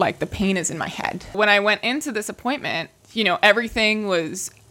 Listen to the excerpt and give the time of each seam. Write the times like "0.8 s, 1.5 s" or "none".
1.4 s, 2.9 s